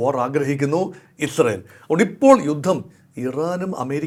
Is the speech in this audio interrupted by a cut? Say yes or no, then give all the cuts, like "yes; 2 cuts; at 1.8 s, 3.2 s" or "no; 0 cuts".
no; 0 cuts